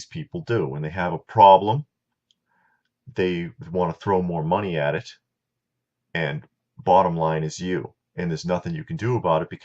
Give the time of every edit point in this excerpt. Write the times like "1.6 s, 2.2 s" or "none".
4.9 s